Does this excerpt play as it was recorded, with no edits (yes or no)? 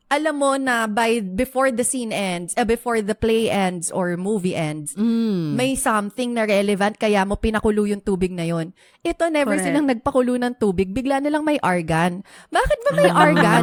yes